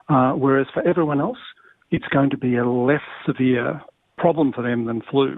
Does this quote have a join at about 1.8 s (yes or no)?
yes